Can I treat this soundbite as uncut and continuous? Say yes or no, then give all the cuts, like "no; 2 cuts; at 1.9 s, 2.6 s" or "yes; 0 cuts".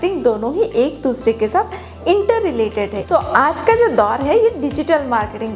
no; 1 cut; at 3.0 s